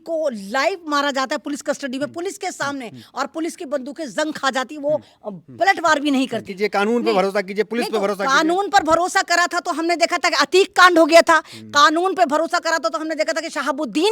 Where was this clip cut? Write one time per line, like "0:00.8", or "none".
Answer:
0:06.5